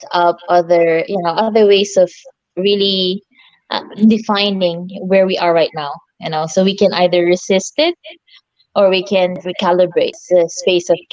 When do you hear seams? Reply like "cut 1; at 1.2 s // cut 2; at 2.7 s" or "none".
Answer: cut 1; at 9.4 s // cut 2; at 10.2 s